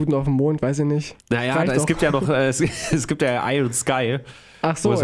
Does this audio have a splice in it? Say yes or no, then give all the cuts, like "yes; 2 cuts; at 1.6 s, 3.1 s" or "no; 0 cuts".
yes; 1 cut; at 1.1 s